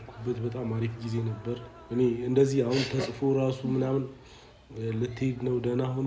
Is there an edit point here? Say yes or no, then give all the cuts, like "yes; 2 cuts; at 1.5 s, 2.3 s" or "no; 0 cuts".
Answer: no; 0 cuts